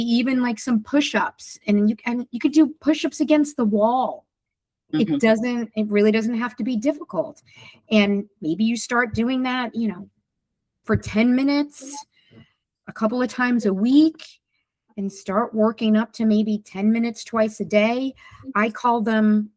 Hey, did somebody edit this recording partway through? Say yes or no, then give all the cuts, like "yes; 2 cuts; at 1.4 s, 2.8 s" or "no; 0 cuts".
no; 0 cuts